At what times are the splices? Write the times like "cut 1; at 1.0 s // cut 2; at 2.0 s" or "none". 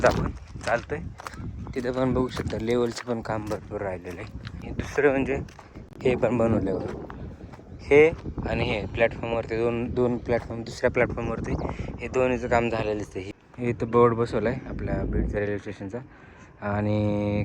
cut 1; at 4.6 s // cut 2; at 13.2 s